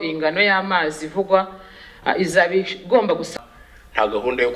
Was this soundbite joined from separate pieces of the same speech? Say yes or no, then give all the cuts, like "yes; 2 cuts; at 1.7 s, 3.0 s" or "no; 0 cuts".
yes; 1 cut; at 3.3 s